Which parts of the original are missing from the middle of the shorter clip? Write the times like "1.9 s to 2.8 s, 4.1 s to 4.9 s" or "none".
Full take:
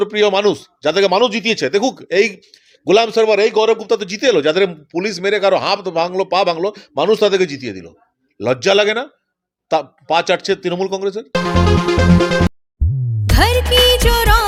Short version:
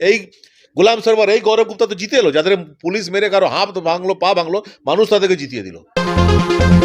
8.0 s to 11.2 s